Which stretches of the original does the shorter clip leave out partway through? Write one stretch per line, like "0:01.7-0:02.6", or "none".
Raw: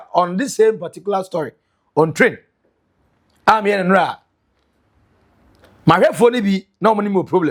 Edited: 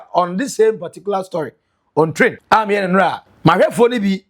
0:02.4-0:03.4
0:04.2-0:05.7